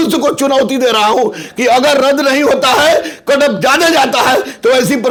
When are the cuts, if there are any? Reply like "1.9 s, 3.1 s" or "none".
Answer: none